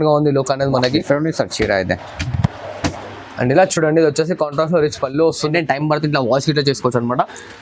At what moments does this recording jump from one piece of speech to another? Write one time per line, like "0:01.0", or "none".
0:05.4